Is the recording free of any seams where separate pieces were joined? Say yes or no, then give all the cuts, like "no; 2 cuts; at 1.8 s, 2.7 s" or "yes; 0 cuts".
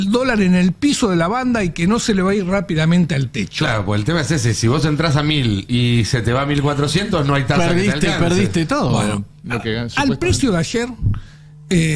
yes; 0 cuts